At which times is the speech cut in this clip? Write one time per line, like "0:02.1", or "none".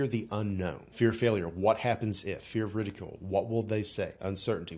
0:00.9